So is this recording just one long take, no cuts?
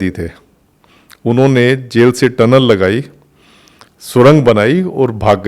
yes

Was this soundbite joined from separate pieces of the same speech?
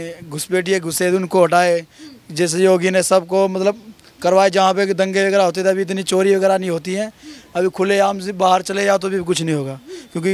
no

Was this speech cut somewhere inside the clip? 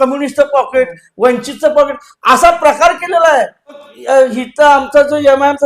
yes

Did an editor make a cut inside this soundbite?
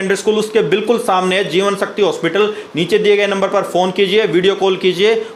no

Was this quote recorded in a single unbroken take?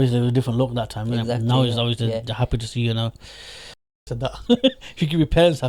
no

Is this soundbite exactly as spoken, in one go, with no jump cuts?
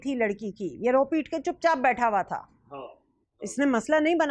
yes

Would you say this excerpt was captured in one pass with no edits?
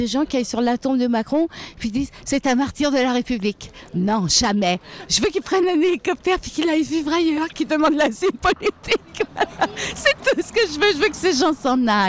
yes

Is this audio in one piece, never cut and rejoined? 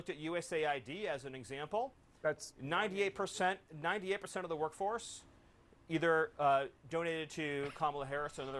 yes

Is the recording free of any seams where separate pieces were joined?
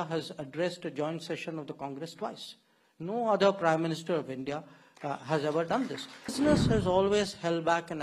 no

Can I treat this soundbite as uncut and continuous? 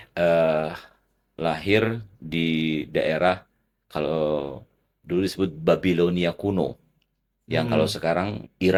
yes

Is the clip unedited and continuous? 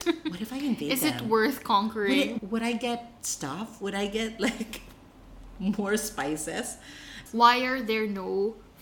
no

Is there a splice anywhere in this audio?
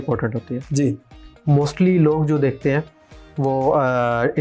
no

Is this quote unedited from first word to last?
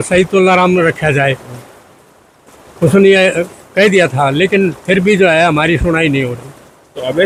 yes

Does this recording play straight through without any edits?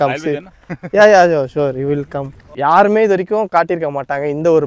no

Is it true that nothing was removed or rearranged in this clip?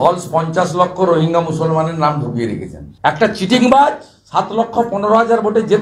no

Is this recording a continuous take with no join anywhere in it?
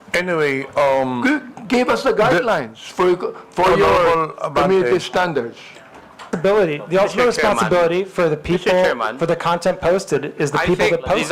no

